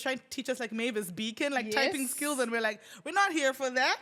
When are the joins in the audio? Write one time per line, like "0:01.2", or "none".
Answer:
none